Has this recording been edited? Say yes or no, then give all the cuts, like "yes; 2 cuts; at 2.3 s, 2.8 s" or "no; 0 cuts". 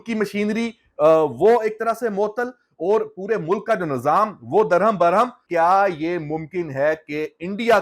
yes; 1 cut; at 5.4 s